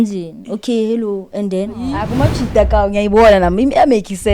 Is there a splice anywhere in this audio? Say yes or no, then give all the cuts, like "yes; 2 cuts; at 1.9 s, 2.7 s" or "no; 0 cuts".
yes; 1 cut; at 2.1 s